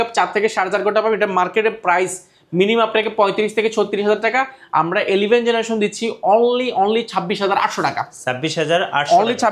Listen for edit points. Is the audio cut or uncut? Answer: uncut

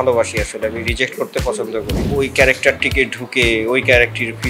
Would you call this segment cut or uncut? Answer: cut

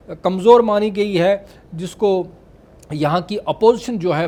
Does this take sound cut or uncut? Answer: uncut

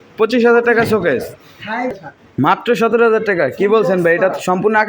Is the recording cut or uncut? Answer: cut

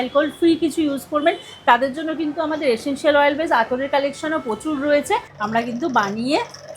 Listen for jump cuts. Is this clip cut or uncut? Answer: cut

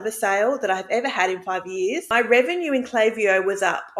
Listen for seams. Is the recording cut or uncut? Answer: cut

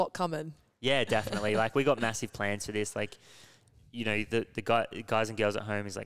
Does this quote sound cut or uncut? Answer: uncut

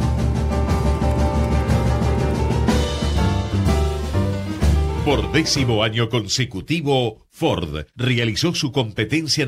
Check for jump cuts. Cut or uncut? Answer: cut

